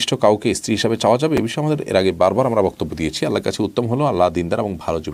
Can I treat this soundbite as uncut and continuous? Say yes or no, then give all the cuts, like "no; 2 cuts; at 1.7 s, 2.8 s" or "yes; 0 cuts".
yes; 0 cuts